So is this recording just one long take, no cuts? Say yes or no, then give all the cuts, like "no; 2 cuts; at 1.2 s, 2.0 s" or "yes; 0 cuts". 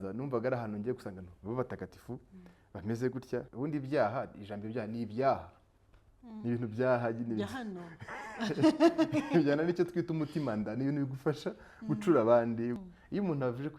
no; 2 cuts; at 3.5 s, 12.8 s